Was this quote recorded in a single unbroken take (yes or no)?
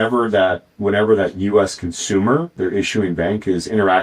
no